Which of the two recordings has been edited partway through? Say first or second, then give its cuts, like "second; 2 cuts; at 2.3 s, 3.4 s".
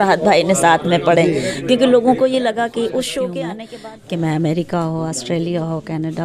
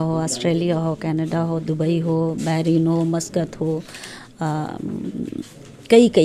first; 1 cut; at 3.6 s